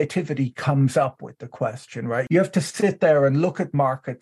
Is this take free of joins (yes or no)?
no